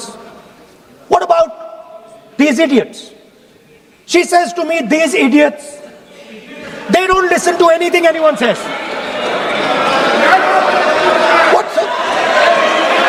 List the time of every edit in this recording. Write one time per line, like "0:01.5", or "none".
none